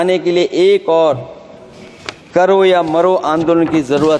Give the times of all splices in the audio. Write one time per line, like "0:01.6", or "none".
none